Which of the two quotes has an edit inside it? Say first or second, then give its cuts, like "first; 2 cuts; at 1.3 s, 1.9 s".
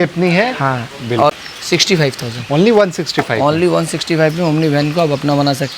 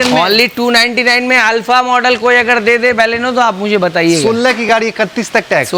first; 1 cut; at 1.3 s